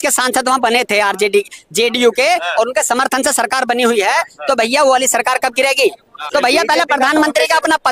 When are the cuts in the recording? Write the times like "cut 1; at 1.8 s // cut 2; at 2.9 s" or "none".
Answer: cut 1; at 6.1 s